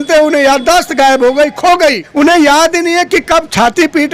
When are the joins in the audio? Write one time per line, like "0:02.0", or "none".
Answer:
0:02.0